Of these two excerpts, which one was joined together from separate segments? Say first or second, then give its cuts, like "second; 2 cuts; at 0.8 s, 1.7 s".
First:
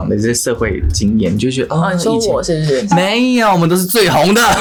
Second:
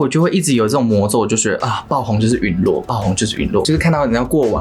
second; 1 cut; at 3.6 s